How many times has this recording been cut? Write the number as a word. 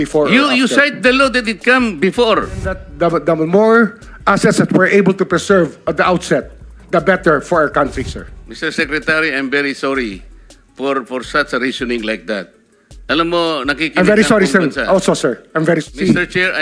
two